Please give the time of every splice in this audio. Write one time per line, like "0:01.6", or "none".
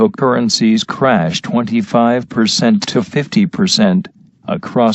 0:01.3